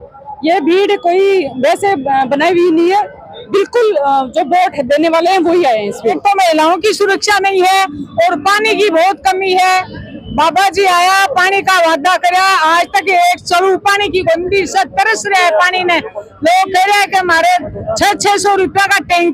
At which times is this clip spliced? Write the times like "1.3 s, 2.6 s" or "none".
6.2 s